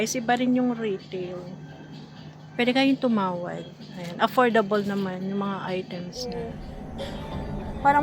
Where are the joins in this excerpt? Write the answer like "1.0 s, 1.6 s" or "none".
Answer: 6.3 s